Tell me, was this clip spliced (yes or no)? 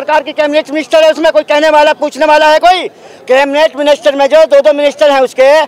no